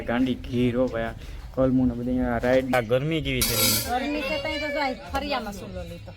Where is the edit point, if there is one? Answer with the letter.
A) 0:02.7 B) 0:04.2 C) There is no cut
A